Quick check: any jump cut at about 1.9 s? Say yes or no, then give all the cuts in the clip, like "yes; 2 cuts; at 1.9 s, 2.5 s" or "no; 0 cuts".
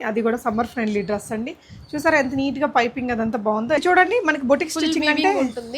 no; 1 cut; at 3.8 s